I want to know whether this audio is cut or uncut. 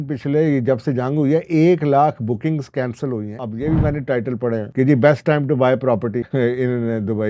cut